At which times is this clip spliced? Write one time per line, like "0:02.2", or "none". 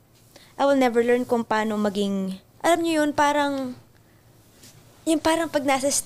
0:02.4